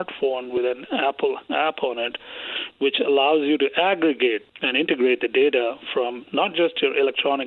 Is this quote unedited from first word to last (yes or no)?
yes